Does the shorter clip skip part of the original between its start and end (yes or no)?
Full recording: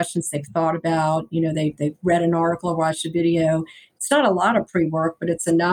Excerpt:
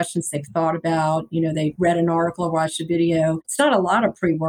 yes